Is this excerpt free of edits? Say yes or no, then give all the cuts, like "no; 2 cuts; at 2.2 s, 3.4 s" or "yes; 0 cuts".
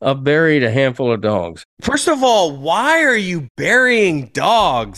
no; 1 cut; at 1.4 s